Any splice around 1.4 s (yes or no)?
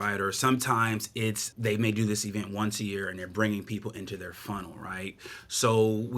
yes